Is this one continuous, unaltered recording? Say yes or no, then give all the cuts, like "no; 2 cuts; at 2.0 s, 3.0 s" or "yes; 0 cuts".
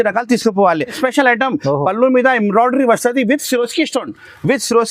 no; 1 cut; at 0.9 s